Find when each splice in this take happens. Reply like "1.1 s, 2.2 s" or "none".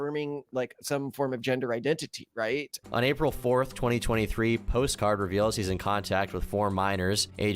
2.7 s